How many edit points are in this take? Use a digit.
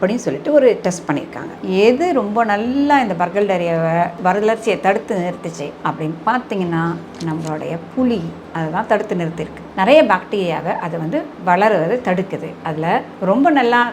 3